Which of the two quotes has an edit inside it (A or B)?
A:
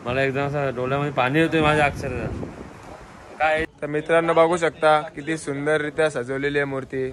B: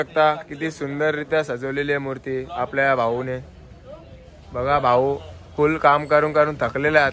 A